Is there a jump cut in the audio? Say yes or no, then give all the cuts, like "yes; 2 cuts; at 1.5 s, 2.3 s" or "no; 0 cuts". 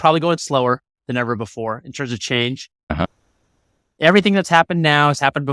no; 0 cuts